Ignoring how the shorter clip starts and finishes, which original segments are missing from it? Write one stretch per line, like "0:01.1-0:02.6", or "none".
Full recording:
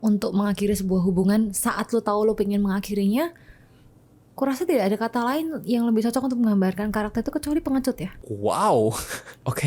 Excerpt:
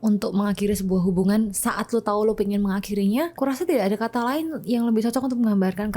0:03.3-0:04.3